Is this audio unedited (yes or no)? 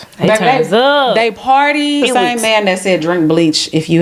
no